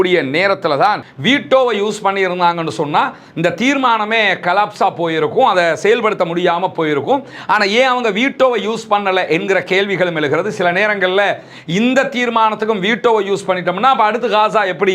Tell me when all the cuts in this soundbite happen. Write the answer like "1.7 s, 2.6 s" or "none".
1.1 s